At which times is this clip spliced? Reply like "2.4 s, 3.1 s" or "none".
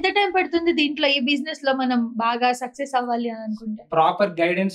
none